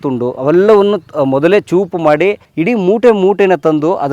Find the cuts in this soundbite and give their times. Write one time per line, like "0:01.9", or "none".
0:02.5